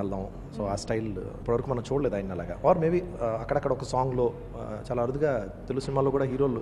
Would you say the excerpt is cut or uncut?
cut